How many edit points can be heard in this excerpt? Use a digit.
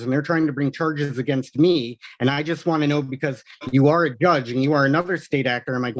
0